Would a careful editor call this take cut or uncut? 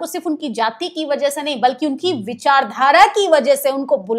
uncut